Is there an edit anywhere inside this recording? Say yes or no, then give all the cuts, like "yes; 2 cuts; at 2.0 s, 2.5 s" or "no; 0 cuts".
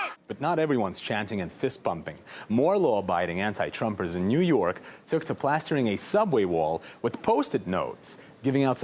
no; 0 cuts